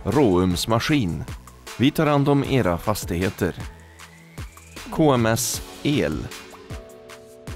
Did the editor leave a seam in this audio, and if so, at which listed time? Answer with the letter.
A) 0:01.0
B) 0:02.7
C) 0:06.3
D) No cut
C